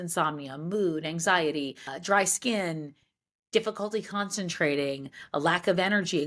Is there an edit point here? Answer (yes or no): yes